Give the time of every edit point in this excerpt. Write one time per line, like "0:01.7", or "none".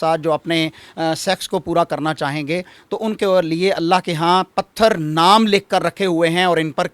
none